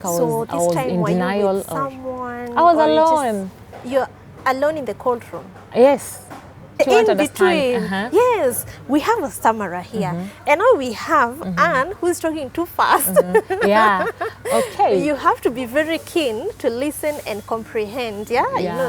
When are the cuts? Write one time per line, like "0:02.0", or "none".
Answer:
0:06.8